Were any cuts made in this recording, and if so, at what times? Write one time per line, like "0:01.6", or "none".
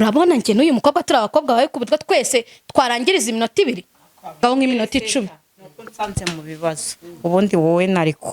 0:04.4